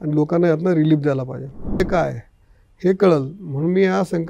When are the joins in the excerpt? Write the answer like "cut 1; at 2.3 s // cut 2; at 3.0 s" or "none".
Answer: cut 1; at 1.8 s